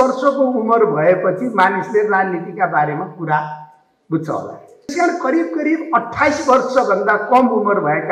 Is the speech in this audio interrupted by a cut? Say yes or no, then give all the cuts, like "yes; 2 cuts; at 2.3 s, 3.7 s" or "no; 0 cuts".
yes; 1 cut; at 4.9 s